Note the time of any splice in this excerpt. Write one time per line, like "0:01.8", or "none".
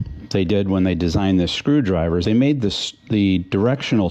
none